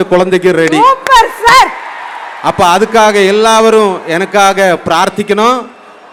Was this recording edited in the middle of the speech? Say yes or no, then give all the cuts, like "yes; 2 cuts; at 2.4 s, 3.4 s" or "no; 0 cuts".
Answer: no; 0 cuts